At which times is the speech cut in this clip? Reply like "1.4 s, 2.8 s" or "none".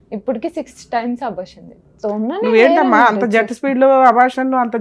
1.9 s